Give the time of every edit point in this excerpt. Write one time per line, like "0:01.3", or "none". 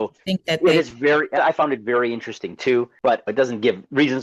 0:02.9